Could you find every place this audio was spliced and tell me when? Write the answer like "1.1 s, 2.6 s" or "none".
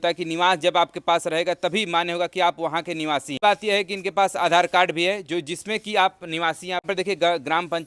3.4 s, 6.9 s